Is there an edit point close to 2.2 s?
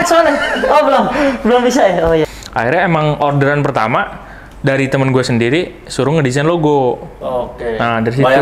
yes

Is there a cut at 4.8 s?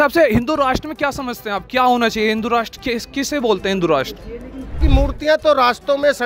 yes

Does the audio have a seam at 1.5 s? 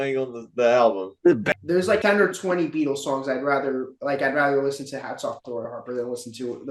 yes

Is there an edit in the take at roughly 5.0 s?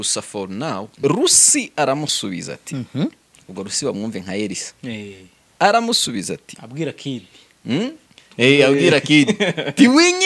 no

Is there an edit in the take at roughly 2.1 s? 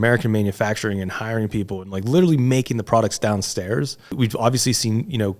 no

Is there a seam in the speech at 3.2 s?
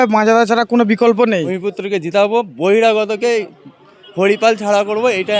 no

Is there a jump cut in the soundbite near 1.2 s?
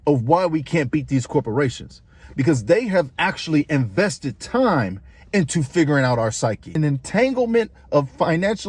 no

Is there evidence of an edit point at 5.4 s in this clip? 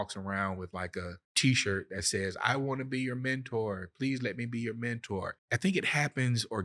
yes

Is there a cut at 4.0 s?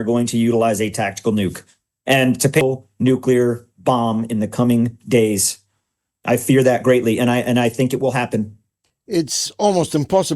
no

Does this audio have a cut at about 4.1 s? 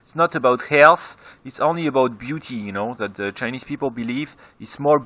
yes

